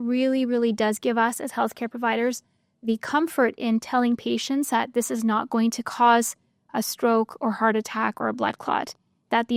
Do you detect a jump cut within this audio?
no; 0 cuts

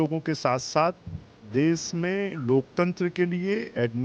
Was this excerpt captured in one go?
yes; 0 cuts

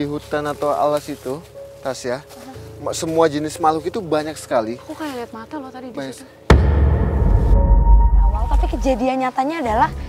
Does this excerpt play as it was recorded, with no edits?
no; 1 cut; at 8.5 s

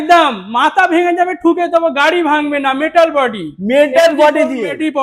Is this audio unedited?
yes; 0 cuts

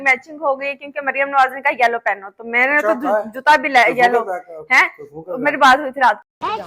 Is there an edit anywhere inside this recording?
no; 0 cuts

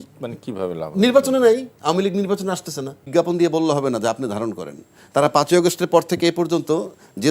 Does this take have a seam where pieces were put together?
yes; 1 cut; at 3.1 s

